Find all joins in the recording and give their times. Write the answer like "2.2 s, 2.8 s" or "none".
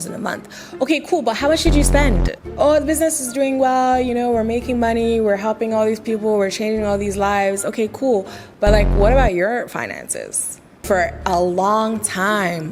2.4 s, 10.8 s